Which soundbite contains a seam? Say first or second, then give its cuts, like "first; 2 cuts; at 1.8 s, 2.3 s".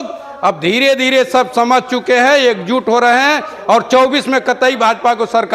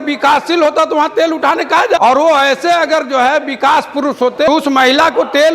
second; 2 cuts; at 2.0 s, 4.5 s